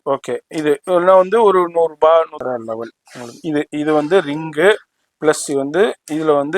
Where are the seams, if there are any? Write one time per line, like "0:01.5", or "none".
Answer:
0:02.4